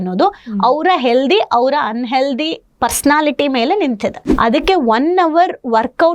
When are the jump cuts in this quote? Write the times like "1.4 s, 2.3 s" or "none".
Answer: 4.3 s